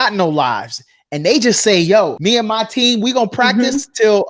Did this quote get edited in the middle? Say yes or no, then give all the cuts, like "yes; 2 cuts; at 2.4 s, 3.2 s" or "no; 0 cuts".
yes; 1 cut; at 2.2 s